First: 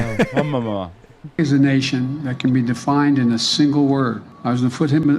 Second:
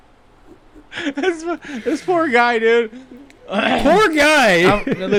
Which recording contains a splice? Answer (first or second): first